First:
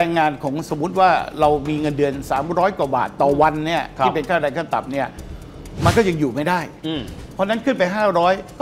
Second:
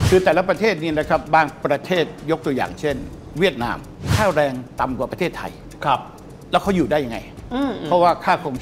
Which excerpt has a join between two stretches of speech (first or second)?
second